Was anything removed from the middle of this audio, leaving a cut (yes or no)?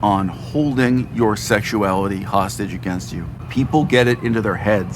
yes